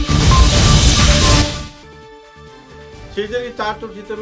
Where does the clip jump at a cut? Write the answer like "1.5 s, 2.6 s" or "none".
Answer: 2.6 s